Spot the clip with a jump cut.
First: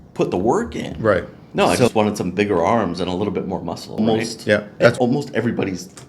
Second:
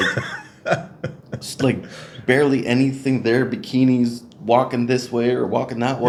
first; 2 cuts; at 1.4 s, 5.0 s

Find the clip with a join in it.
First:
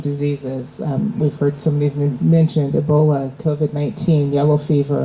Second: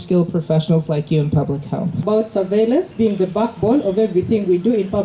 second; 1 cut; at 2.0 s

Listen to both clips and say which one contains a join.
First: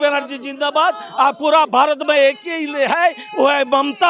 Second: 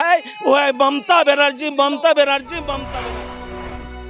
second; 1 cut; at 2.9 s

